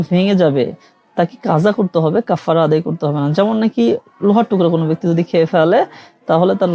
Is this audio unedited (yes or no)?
yes